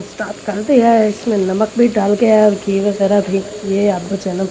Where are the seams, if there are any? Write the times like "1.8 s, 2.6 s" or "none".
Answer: none

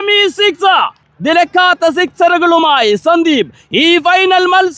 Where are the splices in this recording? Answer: 1.0 s

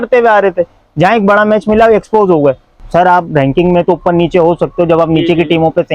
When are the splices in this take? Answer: 2.7 s

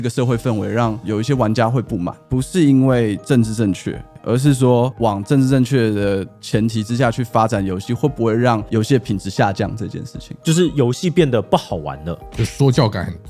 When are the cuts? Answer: 1.0 s, 2.2 s

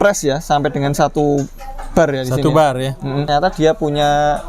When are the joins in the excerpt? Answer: 3.3 s

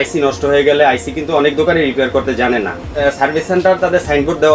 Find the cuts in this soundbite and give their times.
2.9 s

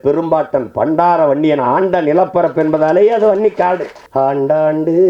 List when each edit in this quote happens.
4.0 s

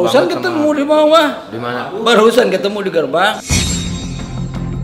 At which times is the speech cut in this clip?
none

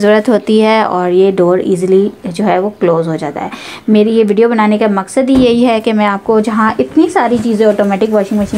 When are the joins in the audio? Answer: none

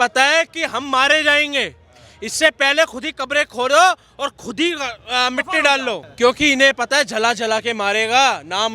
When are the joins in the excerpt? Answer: 6.0 s

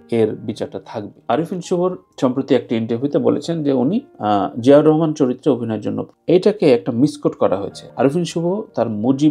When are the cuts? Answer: 1.1 s

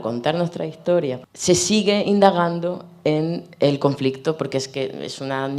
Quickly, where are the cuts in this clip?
1.2 s

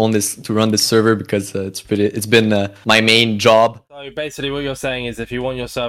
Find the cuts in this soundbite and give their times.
3.9 s

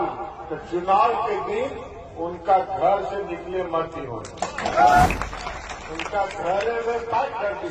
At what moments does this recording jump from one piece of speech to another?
5.1 s

